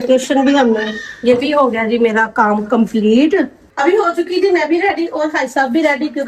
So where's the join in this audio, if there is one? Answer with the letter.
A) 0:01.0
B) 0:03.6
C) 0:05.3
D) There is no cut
B